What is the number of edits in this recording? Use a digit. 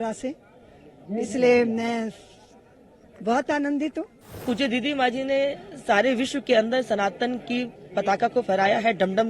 1